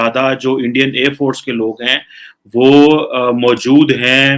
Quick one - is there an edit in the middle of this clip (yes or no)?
no